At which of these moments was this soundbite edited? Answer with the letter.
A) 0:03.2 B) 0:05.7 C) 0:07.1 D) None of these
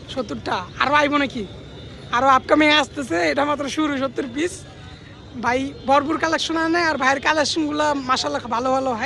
D